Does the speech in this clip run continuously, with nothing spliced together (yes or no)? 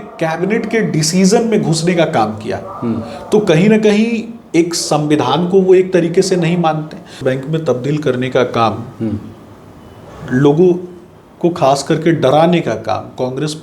no